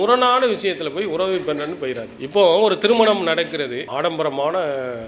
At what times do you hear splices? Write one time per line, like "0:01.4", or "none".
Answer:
0:03.8